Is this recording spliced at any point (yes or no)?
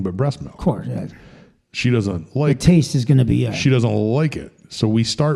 no